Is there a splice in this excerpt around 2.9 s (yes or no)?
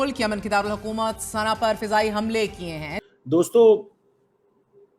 yes